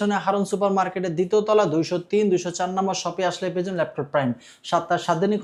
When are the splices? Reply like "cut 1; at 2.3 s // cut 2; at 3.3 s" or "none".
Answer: none